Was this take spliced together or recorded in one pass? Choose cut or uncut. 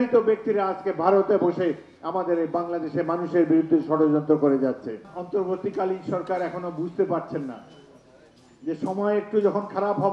cut